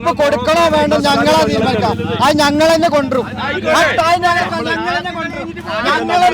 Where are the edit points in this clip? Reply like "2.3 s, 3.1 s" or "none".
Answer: none